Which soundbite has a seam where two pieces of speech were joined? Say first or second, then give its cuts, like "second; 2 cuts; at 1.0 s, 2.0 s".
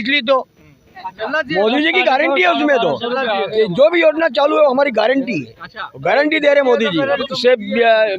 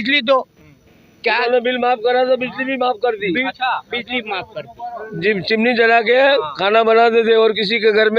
first; 2 cuts; at 1.1 s, 7.3 s